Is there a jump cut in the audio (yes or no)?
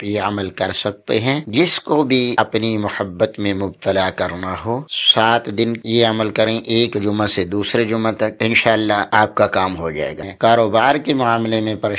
yes